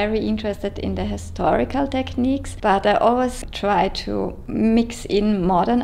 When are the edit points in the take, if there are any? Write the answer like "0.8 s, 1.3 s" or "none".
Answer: 2.5 s, 4.4 s